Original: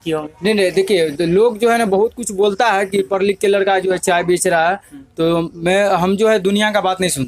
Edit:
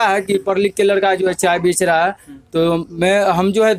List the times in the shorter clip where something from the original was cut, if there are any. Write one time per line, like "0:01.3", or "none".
none